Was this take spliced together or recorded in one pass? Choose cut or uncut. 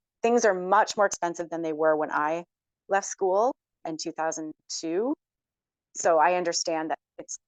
uncut